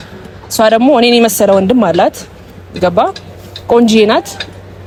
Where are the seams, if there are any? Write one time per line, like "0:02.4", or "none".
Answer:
none

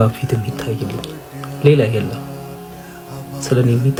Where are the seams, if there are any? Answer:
none

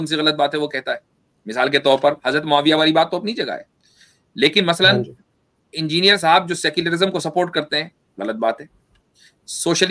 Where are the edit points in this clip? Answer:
none

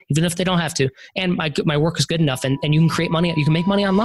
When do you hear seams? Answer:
none

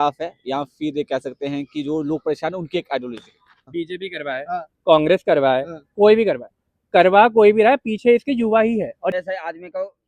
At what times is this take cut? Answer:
0:03.7
0:09.1

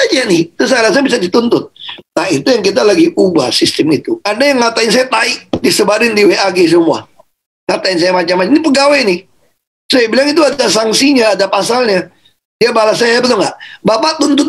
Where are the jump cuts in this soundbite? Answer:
0:04.2

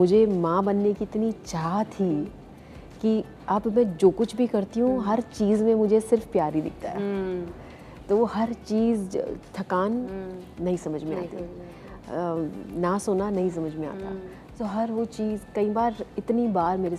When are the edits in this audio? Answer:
none

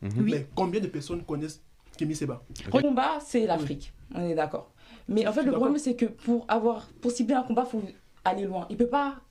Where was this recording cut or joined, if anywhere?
0:02.8

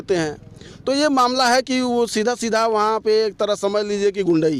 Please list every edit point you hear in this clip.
none

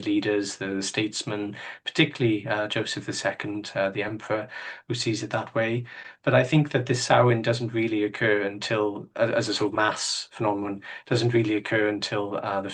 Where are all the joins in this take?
none

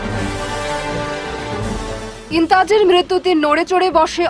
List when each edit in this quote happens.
none

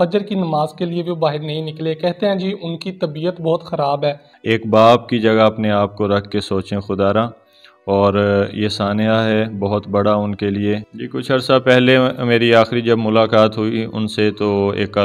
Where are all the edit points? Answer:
0:04.3
0:11.0

